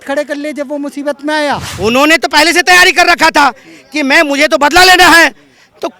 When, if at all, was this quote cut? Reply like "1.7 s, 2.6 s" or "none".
1.7 s